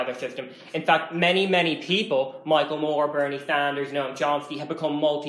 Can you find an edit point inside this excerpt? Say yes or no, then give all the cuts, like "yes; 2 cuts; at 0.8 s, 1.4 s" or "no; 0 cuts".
no; 0 cuts